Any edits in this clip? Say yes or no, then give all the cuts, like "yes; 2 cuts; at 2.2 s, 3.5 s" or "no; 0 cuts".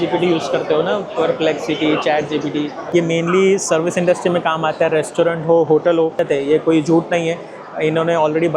yes; 2 cuts; at 2.8 s, 6.2 s